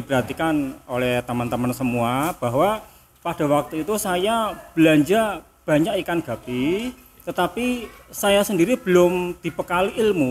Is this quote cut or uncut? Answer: uncut